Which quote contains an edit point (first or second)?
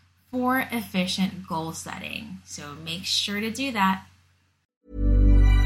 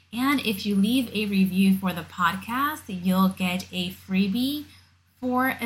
first